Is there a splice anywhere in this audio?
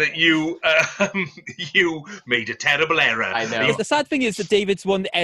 yes; 1 cut; at 3.8 s

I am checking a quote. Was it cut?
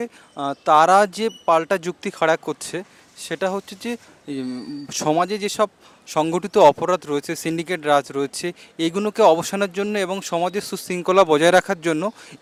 no; 0 cuts

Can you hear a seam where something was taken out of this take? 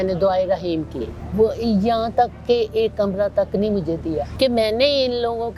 yes; 2 cuts; at 1.2 s, 4.3 s

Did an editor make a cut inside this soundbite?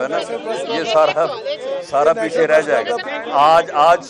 yes; 1 cut; at 3.0 s

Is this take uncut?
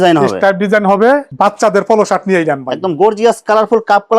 no; 1 cut; at 1.3 s

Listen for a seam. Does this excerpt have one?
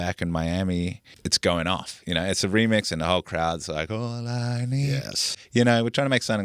yes; 2 cuts; at 1.2 s, 5.4 s

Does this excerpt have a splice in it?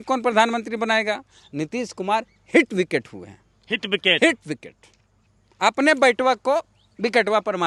no; 0 cuts

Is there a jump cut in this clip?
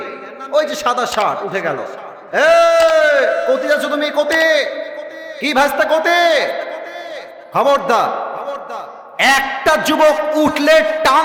no; 0 cuts

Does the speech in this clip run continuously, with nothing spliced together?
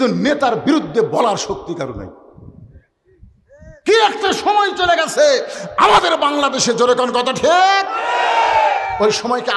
yes; 0 cuts

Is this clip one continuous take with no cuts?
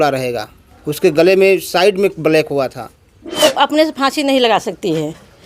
no; 1 cut; at 3.4 s

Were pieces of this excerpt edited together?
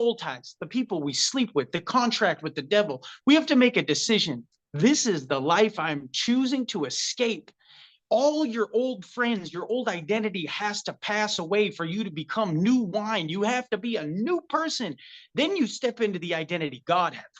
no; 0 cuts

